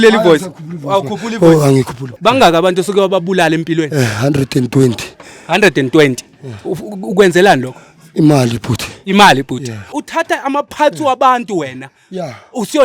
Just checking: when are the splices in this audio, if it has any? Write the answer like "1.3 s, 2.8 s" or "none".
2.0 s, 9.9 s